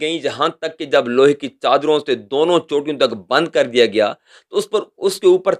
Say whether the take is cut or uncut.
uncut